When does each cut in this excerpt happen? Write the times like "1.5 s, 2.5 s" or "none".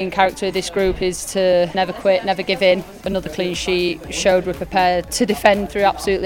1.7 s, 3.0 s, 4.1 s, 5.1 s